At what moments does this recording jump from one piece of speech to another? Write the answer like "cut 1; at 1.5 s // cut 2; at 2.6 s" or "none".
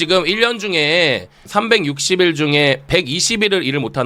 cut 1; at 1.4 s